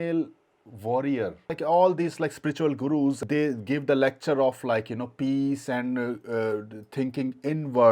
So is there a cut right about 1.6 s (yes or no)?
yes